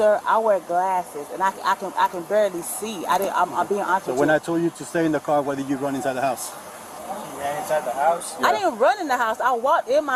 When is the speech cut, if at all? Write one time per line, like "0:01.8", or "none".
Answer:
none